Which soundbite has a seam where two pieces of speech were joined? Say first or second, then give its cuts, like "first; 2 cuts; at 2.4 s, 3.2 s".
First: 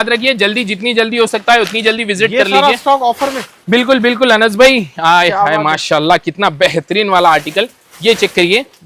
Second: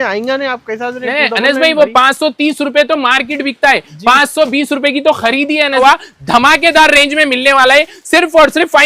second; 1 cut; at 5.8 s